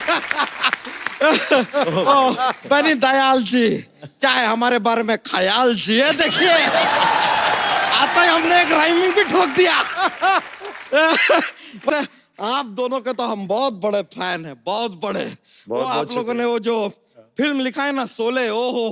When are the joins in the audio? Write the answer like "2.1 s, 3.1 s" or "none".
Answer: 11.9 s